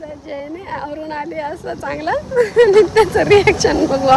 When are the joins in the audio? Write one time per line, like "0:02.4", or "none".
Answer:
none